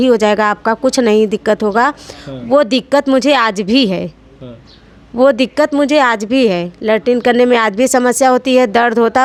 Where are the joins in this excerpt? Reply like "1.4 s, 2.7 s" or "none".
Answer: none